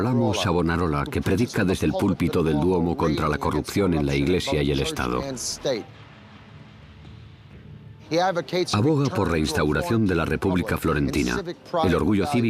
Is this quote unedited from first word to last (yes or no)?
no